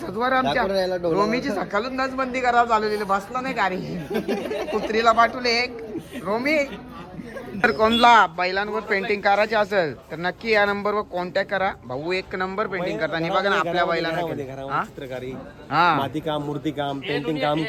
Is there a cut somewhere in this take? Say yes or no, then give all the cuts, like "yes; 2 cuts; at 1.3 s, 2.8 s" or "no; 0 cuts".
no; 0 cuts